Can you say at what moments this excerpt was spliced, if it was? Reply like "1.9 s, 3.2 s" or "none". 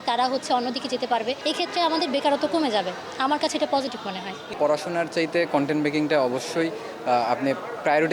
1.4 s, 4.4 s